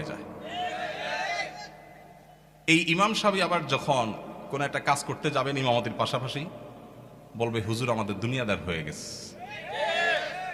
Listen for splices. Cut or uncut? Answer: uncut